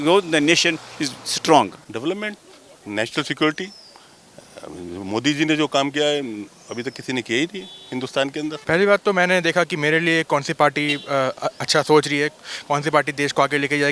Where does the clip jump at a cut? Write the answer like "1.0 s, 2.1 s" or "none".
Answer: 1.8 s, 8.6 s